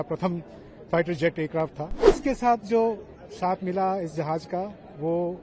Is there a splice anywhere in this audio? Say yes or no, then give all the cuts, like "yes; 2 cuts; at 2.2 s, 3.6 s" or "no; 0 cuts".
yes; 1 cut; at 2.2 s